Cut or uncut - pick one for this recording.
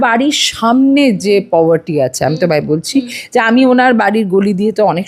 uncut